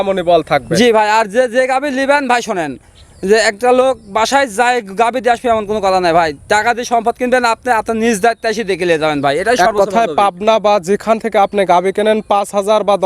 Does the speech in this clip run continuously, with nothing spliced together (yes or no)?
yes